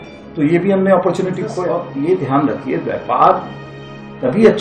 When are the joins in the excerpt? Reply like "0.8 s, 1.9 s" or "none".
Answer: 1.6 s